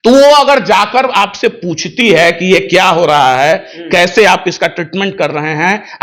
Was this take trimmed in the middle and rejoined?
no; 0 cuts

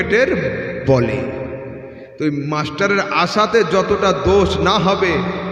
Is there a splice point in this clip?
no; 0 cuts

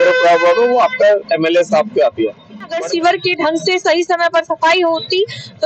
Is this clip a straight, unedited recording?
no; 1 cut; at 2.8 s

